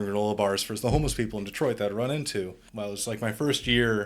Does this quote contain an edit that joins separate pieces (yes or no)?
yes